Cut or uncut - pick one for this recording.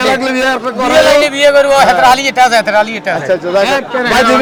uncut